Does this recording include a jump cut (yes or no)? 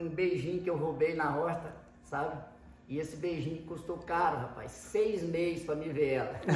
no